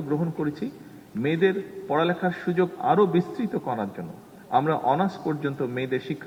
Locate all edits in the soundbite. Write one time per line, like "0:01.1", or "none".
none